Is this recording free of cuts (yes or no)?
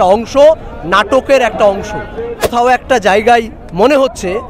no